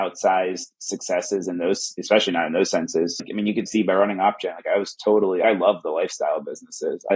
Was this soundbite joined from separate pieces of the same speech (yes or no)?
yes